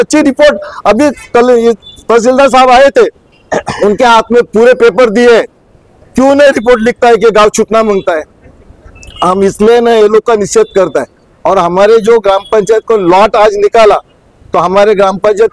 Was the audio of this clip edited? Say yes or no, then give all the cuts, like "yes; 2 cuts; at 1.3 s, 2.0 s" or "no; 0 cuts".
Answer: no; 0 cuts